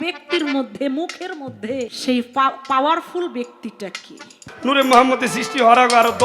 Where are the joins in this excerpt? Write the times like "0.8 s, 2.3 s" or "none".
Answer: 1.9 s, 4.5 s